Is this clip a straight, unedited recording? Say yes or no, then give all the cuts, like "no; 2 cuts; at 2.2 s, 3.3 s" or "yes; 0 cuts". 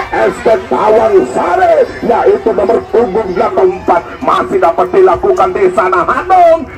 no; 1 cut; at 3.6 s